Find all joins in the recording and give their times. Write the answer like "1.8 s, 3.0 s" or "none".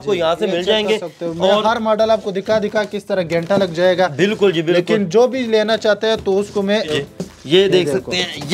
6.9 s